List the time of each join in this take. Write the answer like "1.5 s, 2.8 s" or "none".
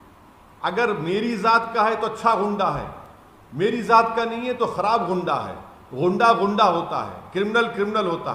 none